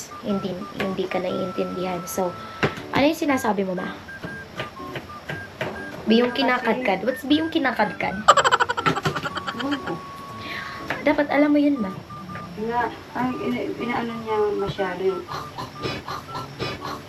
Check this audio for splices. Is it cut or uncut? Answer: uncut